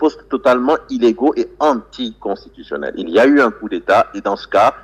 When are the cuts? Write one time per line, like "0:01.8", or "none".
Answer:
none

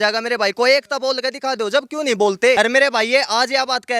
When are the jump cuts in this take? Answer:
0:02.6

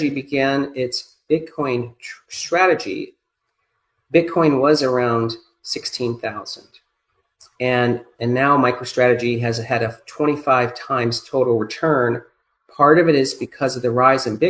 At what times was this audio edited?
none

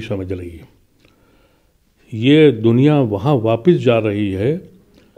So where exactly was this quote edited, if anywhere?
none

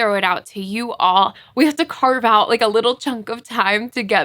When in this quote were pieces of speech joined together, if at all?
0:01.4

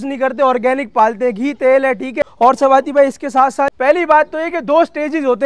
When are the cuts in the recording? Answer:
0:02.2
0:03.7

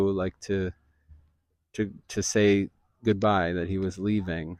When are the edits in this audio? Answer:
none

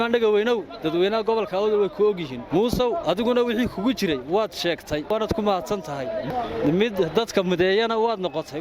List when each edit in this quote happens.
0:02.3
0:05.1
0:06.3

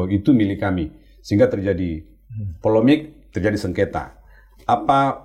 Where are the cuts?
none

